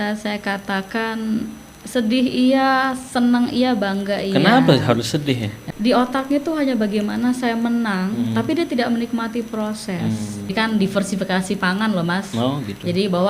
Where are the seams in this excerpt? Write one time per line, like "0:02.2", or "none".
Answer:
0:05.5
0:10.5